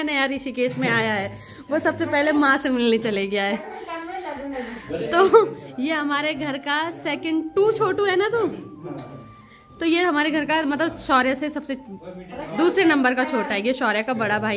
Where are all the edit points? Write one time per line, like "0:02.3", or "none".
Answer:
none